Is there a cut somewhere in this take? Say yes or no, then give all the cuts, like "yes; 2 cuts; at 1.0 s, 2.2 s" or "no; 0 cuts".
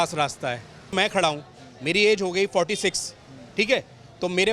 yes; 1 cut; at 0.9 s